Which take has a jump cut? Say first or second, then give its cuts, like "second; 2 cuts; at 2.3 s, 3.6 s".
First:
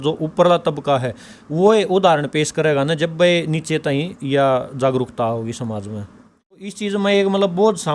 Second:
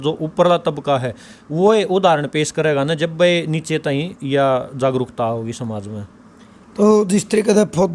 first; 1 cut; at 6.7 s